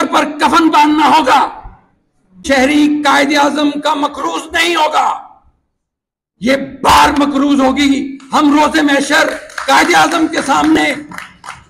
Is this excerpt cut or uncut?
cut